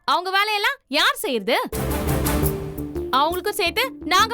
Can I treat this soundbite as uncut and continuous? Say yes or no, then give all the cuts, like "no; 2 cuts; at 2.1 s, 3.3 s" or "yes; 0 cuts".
yes; 0 cuts